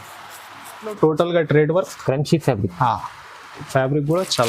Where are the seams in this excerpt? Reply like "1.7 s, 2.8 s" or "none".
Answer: 1.0 s